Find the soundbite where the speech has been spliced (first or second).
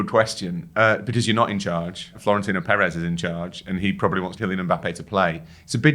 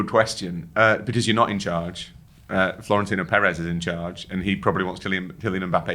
first